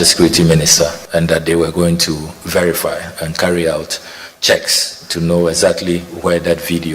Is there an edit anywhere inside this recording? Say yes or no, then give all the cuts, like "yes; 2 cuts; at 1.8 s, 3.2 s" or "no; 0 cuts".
yes; 1 cut; at 1.0 s